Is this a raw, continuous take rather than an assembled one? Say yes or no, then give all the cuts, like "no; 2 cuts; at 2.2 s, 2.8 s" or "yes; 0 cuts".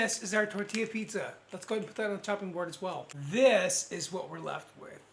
yes; 0 cuts